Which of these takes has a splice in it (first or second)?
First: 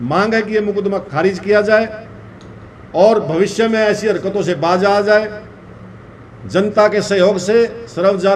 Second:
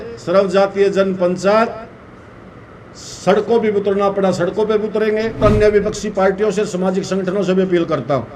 second